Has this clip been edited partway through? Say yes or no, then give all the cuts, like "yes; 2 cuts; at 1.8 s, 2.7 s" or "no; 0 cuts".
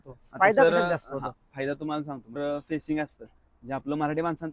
yes; 1 cut; at 2.3 s